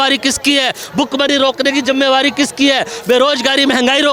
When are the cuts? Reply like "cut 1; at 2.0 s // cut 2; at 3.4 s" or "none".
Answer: none